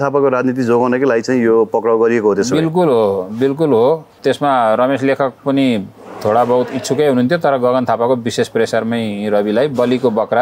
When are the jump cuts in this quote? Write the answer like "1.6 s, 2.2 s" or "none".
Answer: 4.2 s